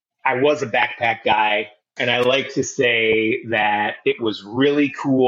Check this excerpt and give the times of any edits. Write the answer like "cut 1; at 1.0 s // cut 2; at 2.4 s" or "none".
cut 1; at 1.9 s

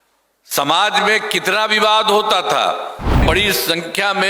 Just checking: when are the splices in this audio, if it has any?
cut 1; at 3.2 s

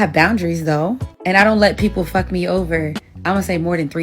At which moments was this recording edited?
cut 1; at 3.0 s

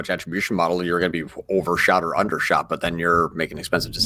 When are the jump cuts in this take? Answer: none

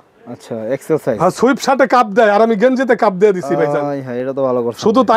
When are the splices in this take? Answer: none

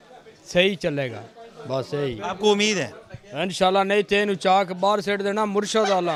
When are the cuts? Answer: none

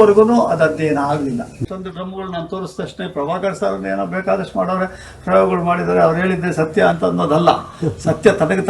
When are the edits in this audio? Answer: cut 1; at 1.6 s

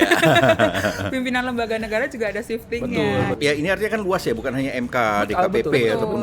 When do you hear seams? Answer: cut 1; at 3.4 s

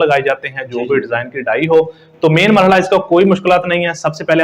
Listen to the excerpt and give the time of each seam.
none

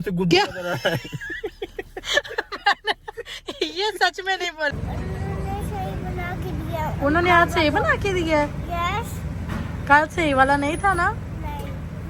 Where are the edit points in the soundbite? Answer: cut 1; at 2.0 s // cut 2; at 5.0 s

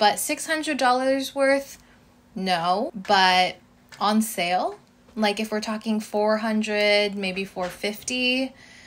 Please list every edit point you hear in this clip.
none

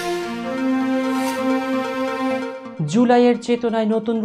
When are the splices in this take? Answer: cut 1; at 2.6 s

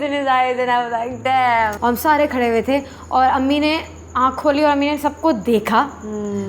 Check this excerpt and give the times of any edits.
cut 1; at 1.8 s

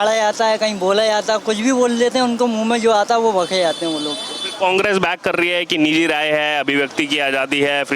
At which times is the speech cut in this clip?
none

